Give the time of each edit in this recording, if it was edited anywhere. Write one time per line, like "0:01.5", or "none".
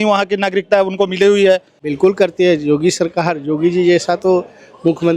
0:01.8